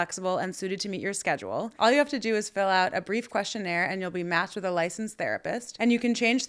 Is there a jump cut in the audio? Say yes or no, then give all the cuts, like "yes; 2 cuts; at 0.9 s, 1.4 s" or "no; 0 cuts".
no; 0 cuts